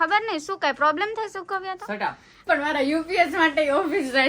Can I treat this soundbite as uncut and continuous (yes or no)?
no